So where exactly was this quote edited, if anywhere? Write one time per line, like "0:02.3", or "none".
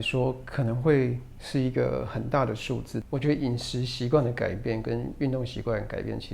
0:03.0